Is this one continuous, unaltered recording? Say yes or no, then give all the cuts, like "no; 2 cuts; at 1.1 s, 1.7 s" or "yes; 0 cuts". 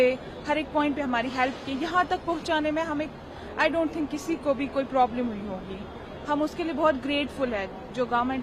yes; 0 cuts